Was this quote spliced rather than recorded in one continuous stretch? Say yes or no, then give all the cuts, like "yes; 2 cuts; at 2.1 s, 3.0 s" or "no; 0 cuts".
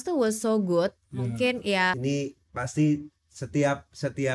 yes; 1 cut; at 2.0 s